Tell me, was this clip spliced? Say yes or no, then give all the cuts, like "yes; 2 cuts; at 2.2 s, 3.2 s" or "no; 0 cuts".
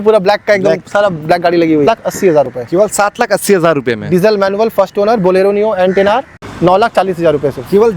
yes; 2 cuts; at 1.9 s, 6.4 s